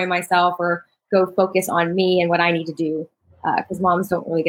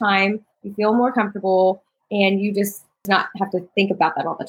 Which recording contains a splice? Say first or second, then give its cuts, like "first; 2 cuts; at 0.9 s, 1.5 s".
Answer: second; 1 cut; at 3.0 s